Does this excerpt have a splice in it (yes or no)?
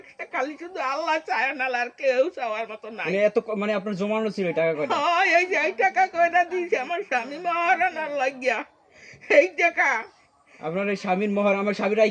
no